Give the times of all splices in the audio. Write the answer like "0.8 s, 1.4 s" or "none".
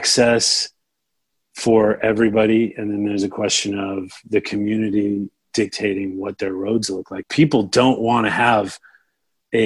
7.2 s